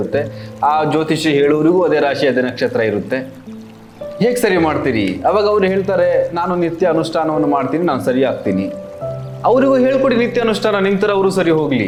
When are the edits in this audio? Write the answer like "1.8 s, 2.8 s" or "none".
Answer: none